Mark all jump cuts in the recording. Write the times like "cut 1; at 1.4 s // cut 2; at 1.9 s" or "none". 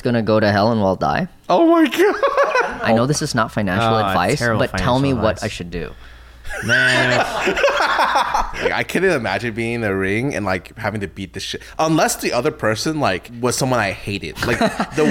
cut 1; at 2.6 s // cut 2; at 8.7 s // cut 3; at 13.3 s